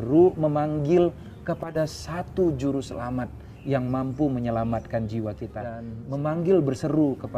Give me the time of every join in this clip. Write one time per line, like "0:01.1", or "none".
0:05.9